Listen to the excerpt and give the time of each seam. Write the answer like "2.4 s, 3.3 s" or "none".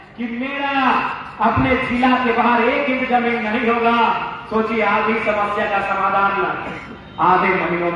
none